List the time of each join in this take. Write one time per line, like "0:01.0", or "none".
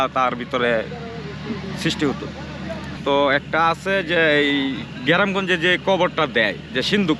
0:02.9